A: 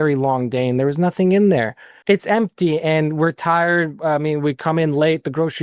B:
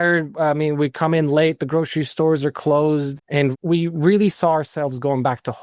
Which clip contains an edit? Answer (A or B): A